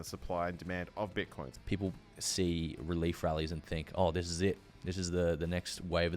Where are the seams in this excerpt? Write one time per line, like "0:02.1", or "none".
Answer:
0:01.5